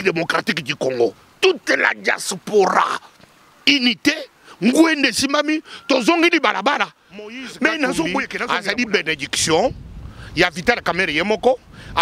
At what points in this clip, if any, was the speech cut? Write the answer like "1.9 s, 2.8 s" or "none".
8.4 s